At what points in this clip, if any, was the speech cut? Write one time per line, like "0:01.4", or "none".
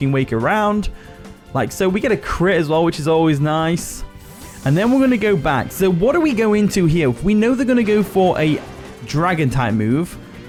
none